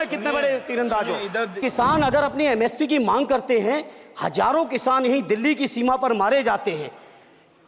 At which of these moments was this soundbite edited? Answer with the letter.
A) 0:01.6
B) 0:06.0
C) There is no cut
A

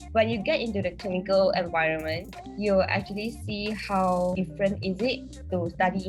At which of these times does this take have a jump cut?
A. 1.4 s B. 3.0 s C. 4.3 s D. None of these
C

